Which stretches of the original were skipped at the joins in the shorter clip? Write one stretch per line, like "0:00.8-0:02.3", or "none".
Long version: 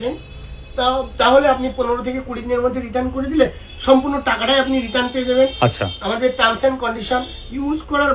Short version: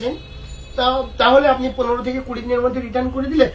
none